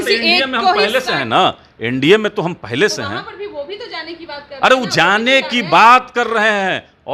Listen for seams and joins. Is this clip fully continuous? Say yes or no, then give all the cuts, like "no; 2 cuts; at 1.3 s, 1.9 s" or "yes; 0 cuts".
yes; 0 cuts